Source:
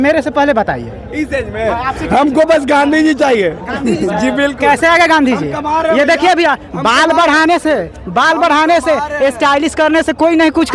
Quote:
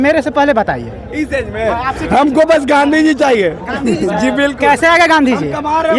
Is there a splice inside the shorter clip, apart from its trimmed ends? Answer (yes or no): no